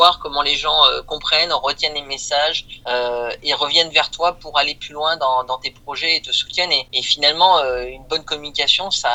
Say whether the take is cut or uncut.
uncut